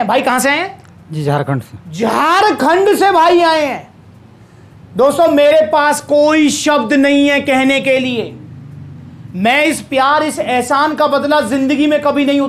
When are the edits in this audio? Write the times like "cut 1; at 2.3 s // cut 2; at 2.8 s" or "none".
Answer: none